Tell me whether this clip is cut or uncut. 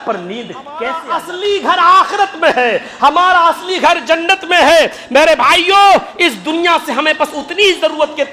cut